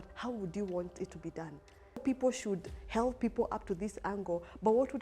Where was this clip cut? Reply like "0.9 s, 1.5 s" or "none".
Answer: 2.0 s